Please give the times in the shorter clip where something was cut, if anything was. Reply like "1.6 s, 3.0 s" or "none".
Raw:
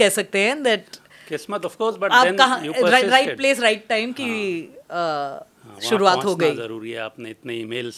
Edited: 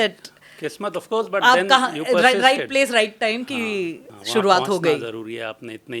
4.1 s